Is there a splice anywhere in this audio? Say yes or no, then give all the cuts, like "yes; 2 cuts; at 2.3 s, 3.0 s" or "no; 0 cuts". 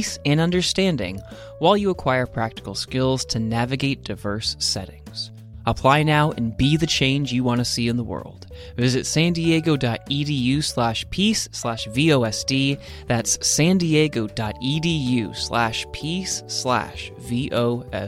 no; 0 cuts